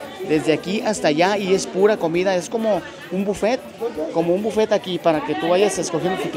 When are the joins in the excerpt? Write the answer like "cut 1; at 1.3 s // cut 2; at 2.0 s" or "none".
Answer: none